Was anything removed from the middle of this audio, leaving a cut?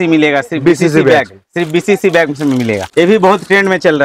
yes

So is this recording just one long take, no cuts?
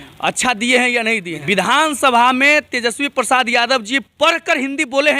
no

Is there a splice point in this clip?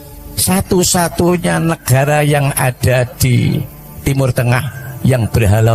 no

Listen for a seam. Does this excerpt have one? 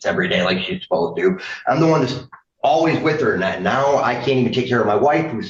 no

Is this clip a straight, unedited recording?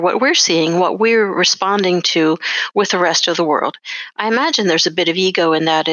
yes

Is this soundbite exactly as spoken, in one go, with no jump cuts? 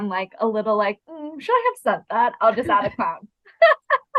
yes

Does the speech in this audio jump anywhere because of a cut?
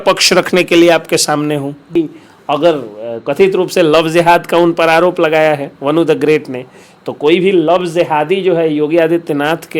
yes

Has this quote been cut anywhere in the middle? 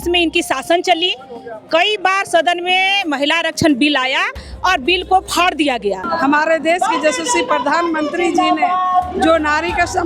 yes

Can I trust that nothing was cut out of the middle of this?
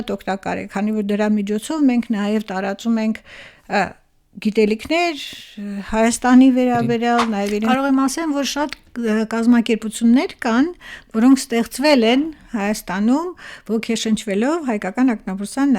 no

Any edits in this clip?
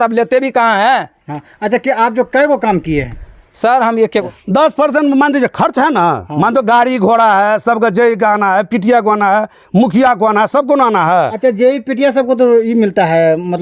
yes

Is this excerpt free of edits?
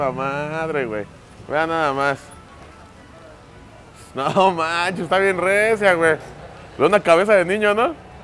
yes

